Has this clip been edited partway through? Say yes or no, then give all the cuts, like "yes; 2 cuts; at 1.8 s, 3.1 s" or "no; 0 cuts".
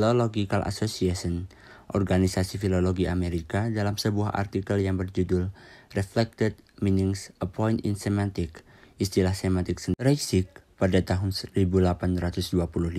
yes; 1 cut; at 10.0 s